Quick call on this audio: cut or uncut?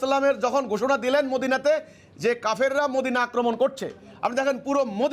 uncut